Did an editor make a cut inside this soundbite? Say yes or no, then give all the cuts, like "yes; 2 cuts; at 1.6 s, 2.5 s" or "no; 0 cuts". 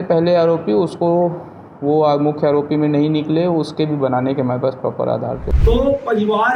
yes; 1 cut; at 5.4 s